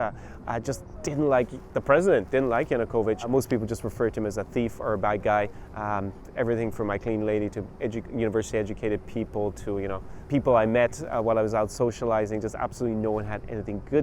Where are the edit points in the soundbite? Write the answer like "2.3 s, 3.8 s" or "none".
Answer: 3.3 s, 10.1 s